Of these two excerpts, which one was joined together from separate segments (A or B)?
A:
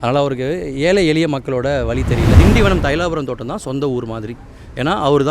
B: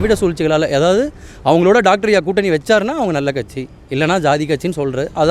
A